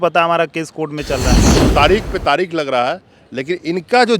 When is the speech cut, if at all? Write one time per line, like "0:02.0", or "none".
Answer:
0:01.5